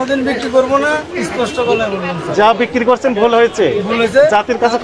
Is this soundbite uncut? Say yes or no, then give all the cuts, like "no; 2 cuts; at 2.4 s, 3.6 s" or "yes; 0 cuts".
yes; 0 cuts